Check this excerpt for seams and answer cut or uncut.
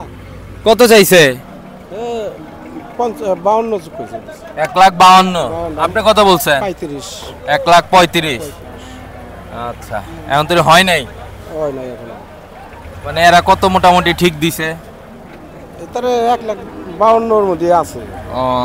uncut